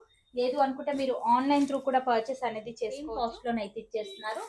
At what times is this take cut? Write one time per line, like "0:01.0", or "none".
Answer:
0:03.0